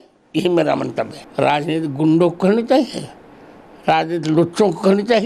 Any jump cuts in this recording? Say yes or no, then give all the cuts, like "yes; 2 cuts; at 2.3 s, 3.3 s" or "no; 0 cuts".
yes; 1 cut; at 1.2 s